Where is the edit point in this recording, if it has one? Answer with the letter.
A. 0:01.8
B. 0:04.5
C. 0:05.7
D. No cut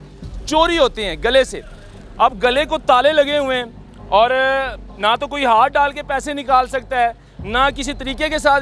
A